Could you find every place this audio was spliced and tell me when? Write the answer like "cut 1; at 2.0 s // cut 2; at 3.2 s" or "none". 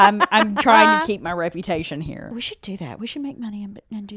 cut 1; at 2.3 s